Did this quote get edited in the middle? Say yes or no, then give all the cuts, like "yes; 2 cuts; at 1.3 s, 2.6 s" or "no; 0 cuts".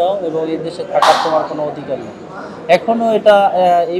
no; 0 cuts